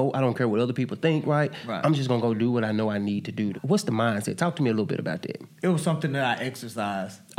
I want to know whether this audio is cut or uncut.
cut